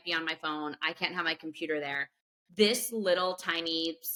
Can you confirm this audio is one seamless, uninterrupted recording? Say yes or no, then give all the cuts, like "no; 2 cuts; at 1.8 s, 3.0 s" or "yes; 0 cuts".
yes; 0 cuts